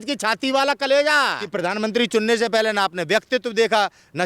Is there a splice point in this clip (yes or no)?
yes